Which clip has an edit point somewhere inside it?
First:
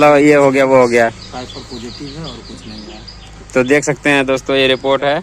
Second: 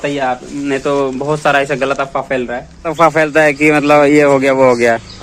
second; 1 cut; at 2.9 s

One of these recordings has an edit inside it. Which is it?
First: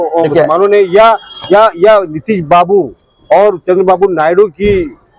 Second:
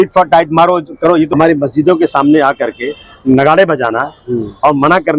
second; 1 cut; at 1.3 s

